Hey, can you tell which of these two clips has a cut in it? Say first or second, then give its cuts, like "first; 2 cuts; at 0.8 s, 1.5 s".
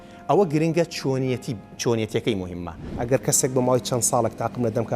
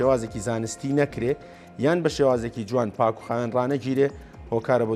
first; 1 cut; at 3.0 s